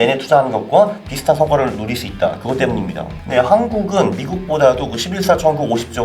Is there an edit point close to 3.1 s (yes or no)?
yes